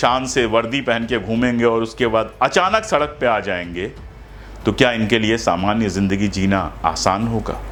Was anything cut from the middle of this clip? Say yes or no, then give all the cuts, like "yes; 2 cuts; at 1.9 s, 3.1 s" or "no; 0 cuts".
no; 0 cuts